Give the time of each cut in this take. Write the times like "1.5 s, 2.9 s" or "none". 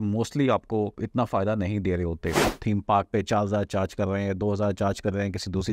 1.0 s, 2.5 s